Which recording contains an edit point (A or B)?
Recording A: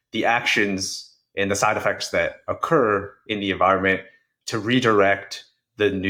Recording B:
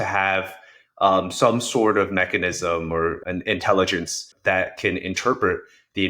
B